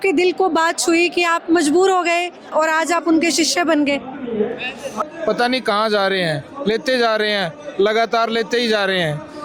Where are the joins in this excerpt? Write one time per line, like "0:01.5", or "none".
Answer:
0:05.0